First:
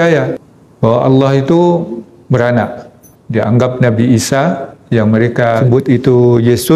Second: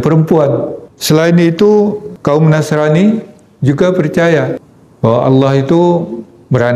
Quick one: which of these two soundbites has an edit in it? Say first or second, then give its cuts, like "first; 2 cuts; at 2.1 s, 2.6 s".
first; 1 cut; at 5.6 s